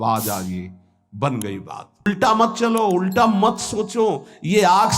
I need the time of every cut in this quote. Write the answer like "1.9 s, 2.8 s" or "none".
2.1 s